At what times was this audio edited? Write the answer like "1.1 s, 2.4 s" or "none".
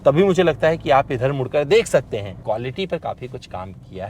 2.3 s